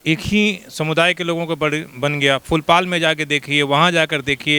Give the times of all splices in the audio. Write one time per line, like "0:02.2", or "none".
none